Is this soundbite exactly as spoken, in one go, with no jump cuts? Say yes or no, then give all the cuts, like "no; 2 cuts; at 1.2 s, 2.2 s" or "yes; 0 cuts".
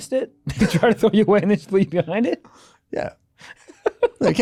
yes; 0 cuts